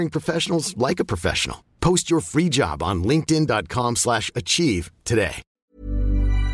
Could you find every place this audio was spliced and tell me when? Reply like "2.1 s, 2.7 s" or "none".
5.5 s

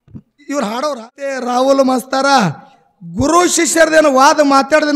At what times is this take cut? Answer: 1.4 s

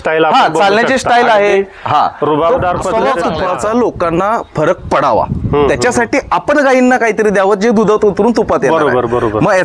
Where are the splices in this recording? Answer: 3.4 s

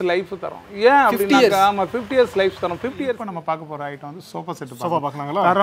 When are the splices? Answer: 3.0 s

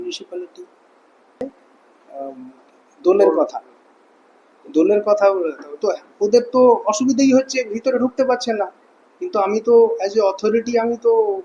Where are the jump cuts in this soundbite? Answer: 1.4 s

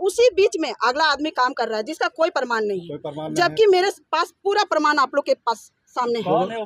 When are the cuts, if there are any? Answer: none

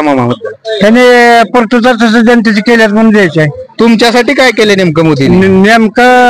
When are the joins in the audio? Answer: none

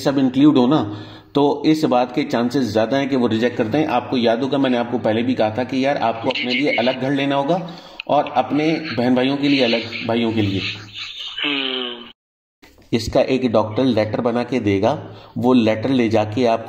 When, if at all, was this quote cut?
12.4 s

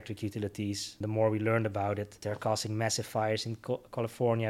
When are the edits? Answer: 0.9 s, 2.1 s

